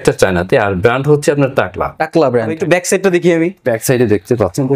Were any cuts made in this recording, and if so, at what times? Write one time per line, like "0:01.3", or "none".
0:02.6